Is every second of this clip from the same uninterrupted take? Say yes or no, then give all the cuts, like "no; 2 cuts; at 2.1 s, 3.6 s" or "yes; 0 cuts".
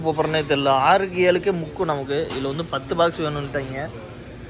yes; 0 cuts